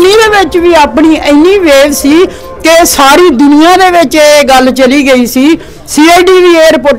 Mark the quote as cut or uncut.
uncut